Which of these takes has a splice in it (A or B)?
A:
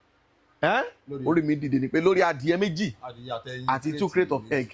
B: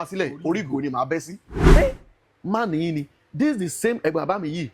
B